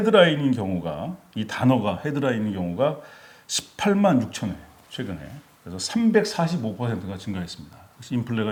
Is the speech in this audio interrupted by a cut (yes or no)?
no